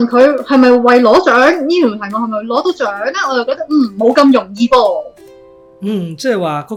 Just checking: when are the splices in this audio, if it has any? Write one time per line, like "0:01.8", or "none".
none